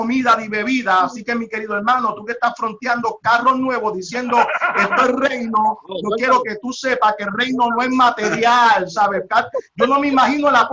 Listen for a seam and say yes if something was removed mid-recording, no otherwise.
no